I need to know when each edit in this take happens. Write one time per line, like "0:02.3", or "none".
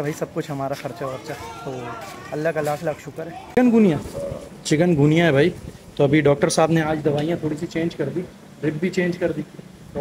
0:03.5